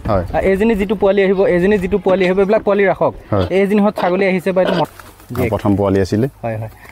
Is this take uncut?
no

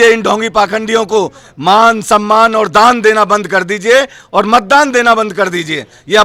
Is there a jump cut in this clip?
no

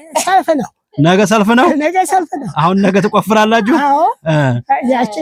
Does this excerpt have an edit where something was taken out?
no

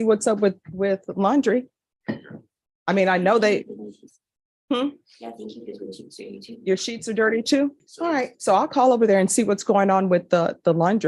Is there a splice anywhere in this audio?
yes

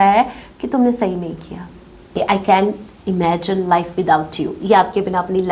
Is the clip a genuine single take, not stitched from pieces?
no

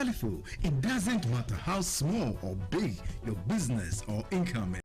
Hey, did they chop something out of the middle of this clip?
no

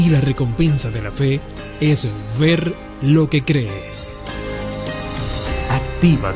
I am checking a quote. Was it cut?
no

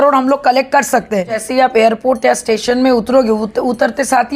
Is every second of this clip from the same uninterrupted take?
no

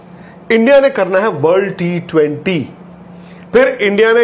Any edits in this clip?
no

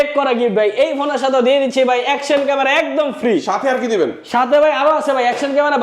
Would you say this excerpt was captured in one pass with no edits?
yes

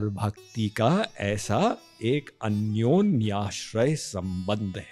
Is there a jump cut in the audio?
no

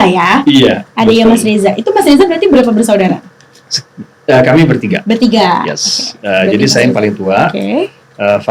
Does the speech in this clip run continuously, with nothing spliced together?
yes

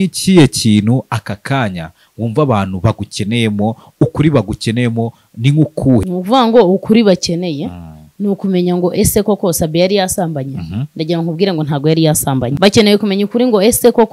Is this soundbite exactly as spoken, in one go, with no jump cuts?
no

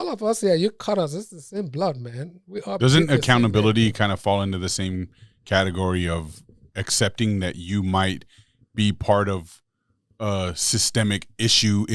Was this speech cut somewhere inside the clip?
no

